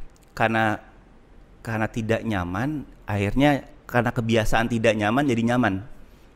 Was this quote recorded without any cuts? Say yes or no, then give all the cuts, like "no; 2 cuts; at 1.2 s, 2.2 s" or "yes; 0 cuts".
yes; 0 cuts